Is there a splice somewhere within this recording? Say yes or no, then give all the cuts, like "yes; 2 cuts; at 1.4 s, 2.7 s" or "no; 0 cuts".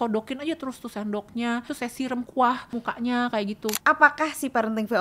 yes; 3 cuts; at 1.7 s, 2.7 s, 3.8 s